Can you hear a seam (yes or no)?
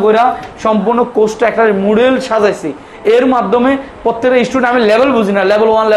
no